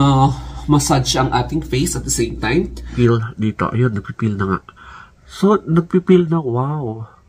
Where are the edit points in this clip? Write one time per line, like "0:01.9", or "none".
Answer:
0:02.9